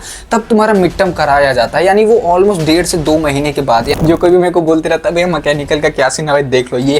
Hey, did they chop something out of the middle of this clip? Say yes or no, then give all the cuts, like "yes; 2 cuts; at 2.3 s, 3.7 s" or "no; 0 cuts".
yes; 1 cut; at 4.0 s